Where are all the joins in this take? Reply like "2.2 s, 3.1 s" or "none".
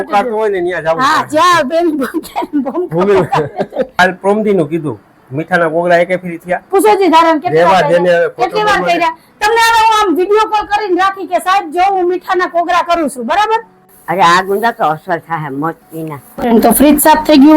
3.9 s, 14.0 s, 16.2 s